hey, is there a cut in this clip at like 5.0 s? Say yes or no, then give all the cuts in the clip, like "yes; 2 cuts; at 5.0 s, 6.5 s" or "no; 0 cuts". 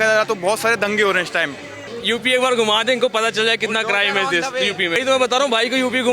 yes; 2 cuts; at 1.8 s, 5.0 s